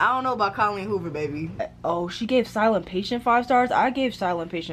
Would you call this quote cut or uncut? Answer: cut